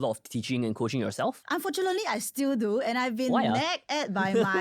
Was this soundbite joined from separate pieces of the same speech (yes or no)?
yes